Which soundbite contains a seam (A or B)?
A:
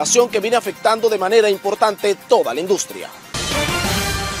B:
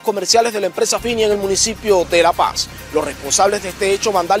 A